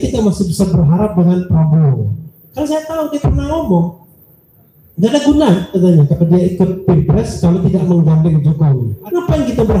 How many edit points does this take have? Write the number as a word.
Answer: one